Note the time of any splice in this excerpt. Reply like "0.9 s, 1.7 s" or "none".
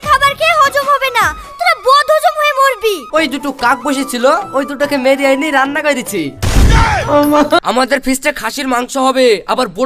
3.0 s, 7.6 s

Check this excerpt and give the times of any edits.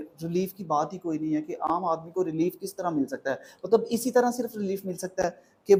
none

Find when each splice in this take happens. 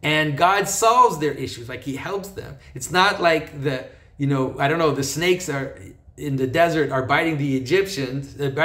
none

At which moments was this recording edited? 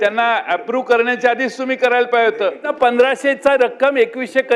2.7 s

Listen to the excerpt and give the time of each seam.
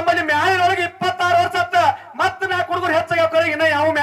none

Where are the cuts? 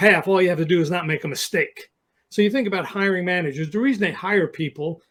none

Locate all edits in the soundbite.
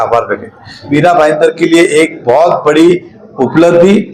0.9 s

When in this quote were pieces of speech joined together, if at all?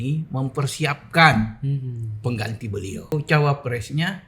3.1 s

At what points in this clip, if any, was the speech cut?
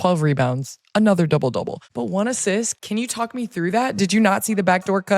1.8 s, 2.7 s

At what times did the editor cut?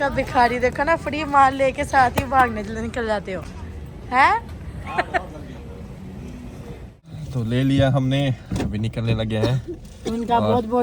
none

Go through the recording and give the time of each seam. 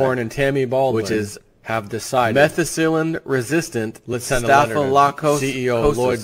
5.1 s

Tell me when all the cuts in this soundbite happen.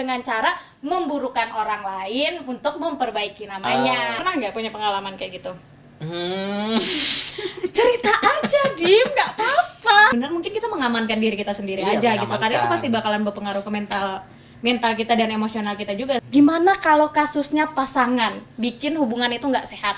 4.2 s, 10.1 s, 16.2 s

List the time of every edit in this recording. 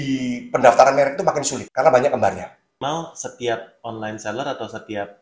1.6 s, 2.8 s

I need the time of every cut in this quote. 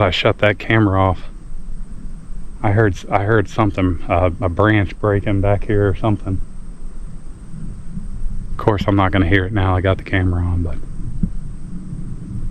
7.7 s

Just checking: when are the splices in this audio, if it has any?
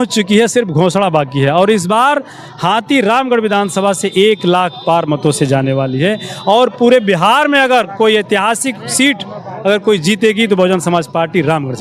none

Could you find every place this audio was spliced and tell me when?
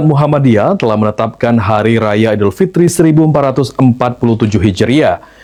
none

